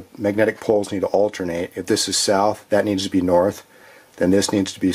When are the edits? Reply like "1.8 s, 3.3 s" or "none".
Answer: 2.6 s